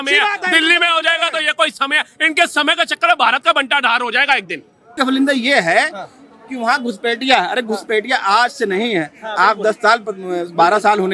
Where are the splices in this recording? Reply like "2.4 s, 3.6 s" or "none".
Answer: 5.0 s

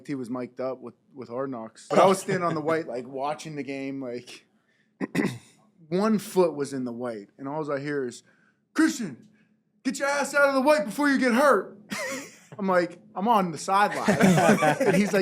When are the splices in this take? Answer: 1.8 s

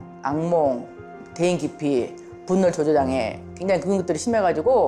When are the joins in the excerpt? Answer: none

